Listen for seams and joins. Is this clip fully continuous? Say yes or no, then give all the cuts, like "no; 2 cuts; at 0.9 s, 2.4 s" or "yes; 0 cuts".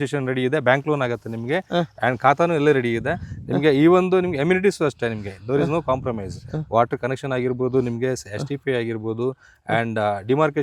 yes; 0 cuts